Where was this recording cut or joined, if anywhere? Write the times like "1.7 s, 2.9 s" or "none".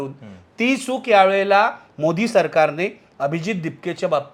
none